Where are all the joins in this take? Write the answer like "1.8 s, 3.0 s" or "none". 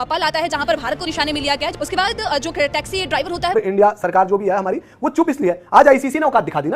3.5 s